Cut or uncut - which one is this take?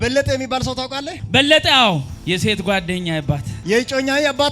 cut